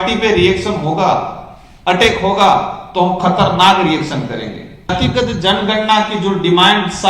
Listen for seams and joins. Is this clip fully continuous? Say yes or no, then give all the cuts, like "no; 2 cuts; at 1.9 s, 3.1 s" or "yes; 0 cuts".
no; 1 cut; at 4.9 s